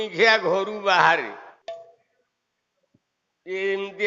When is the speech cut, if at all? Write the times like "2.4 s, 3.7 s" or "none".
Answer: 1.6 s